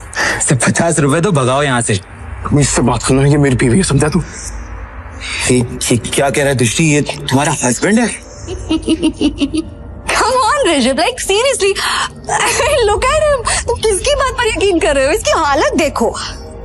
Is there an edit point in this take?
yes; 1 cut; at 8.6 s

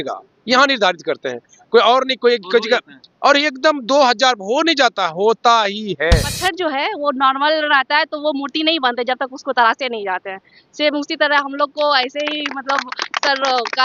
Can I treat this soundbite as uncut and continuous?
no; 1 cut; at 6.4 s

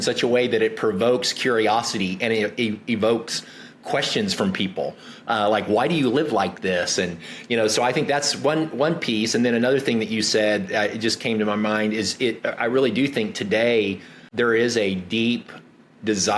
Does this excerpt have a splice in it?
yes; 1 cut; at 14.3 s

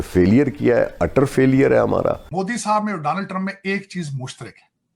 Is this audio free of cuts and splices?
no; 1 cut; at 2.2 s

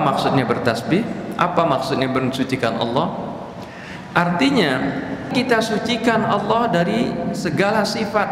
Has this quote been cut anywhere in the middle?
yes; 1 cut; at 5.3 s

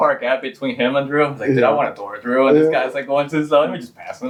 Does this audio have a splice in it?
no; 0 cuts

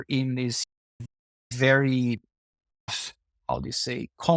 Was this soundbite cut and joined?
no; 0 cuts

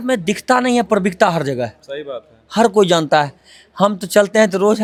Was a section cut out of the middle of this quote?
no; 0 cuts

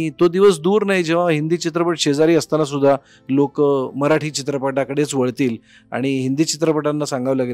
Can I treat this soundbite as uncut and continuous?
yes; 0 cuts

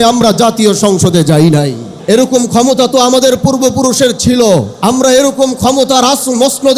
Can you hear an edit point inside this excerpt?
yes; 2 cuts; at 1.9 s, 4.7 s

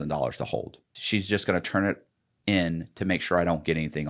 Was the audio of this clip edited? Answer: yes; 1 cut; at 1.0 s

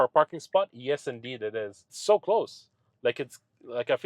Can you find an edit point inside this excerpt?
yes; 1 cut; at 1.9 s

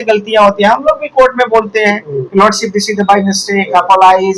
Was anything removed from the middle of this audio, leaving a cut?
no; 0 cuts

